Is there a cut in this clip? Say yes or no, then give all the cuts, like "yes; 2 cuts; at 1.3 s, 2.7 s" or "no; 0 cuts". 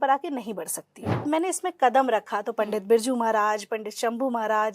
yes; 1 cut; at 1.2 s